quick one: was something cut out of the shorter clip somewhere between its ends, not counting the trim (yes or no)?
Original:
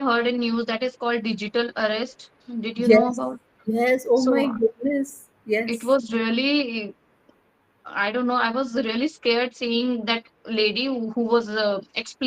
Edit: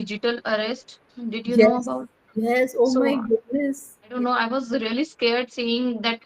yes